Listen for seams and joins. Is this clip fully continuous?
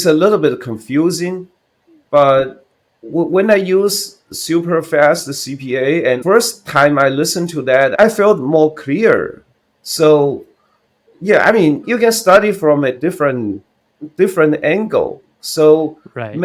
no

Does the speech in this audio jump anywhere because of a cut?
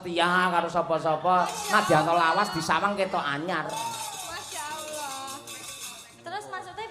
no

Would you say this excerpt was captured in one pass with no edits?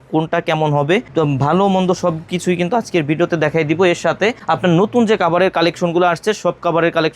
yes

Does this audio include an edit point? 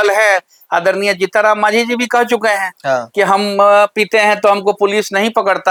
no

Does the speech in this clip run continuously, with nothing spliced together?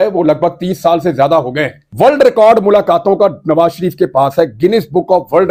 no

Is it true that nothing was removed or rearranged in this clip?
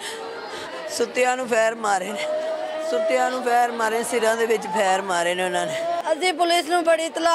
no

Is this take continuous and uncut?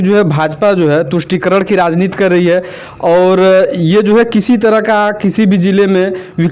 yes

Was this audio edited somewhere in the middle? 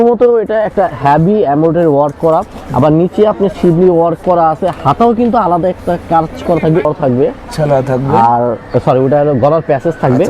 yes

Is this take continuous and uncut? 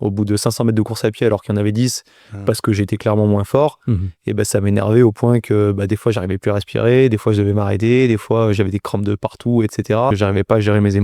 no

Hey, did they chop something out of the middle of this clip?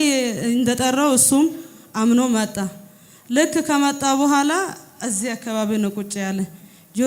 no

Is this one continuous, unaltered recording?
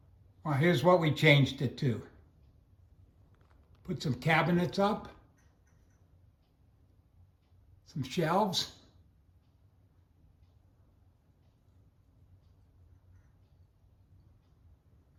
yes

